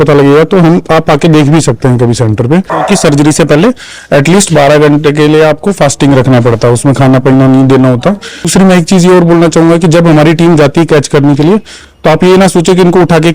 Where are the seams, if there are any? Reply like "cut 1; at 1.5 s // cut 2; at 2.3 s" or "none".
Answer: cut 1; at 2.7 s // cut 2; at 8.5 s

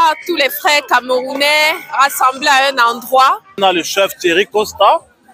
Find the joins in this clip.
cut 1; at 3.6 s

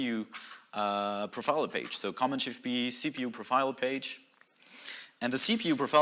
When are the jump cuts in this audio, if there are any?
none

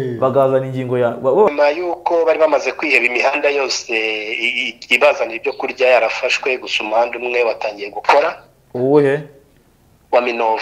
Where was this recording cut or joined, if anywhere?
cut 1; at 1.5 s

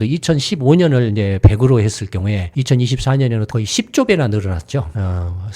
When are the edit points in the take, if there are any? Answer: cut 1; at 2.5 s // cut 2; at 3.5 s

